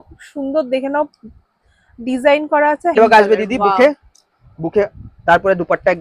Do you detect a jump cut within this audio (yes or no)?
yes